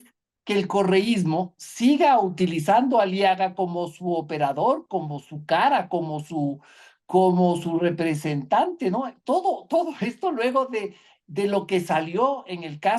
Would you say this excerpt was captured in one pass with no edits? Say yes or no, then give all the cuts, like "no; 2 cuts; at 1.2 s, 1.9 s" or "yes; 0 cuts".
yes; 0 cuts